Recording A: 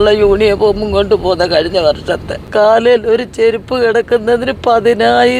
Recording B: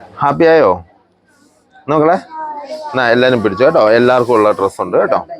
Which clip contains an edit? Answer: A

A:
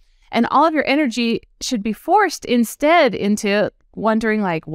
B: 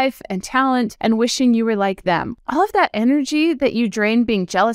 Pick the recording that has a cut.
B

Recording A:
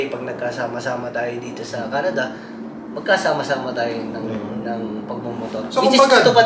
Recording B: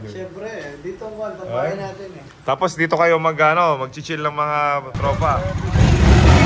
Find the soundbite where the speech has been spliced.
B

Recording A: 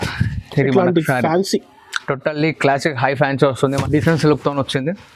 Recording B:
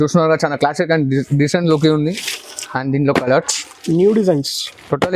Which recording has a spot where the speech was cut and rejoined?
A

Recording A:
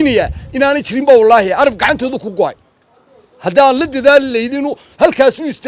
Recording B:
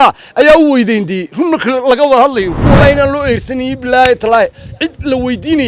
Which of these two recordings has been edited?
B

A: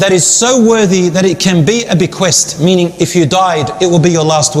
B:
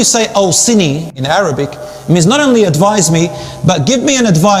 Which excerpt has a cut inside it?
B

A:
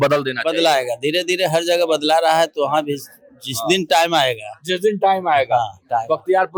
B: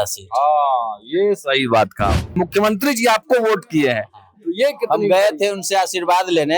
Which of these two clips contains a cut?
B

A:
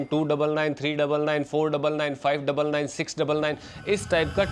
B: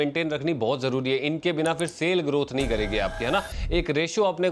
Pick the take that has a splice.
B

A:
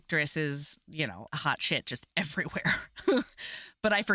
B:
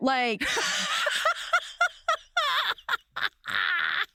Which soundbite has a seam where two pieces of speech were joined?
A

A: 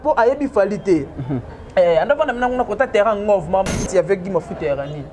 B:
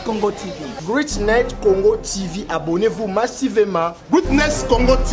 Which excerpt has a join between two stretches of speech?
A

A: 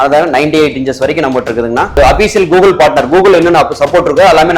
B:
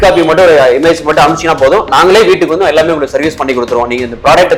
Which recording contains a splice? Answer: A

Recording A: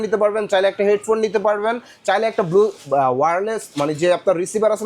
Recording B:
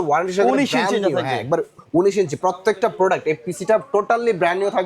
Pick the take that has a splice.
B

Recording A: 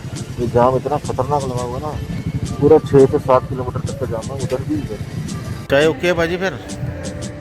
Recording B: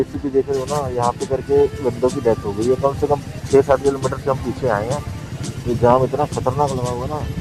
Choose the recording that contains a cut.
A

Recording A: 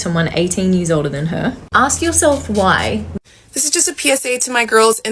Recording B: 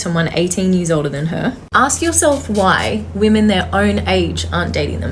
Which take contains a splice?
A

